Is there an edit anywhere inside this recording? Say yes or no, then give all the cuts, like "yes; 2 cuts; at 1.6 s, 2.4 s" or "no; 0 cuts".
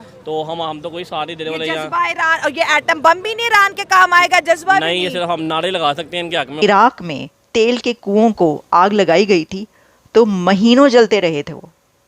yes; 1 cut; at 6.6 s